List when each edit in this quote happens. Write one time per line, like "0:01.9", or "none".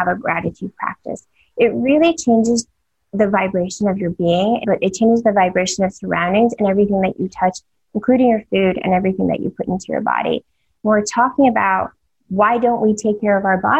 0:04.6
0:10.6

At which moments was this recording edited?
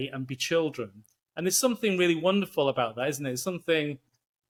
none

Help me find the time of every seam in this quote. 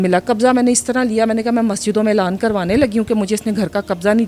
none

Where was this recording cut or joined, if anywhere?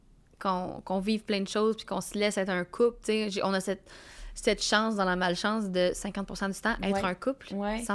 none

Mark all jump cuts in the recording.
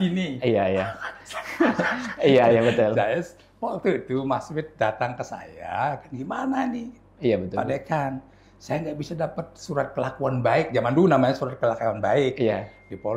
none

